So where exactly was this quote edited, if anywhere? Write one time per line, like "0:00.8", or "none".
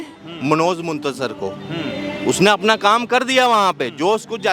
none